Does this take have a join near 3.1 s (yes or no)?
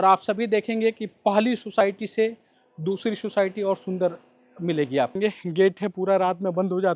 no